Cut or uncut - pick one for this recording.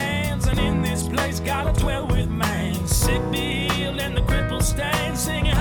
uncut